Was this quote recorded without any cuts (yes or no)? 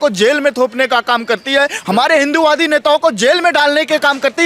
yes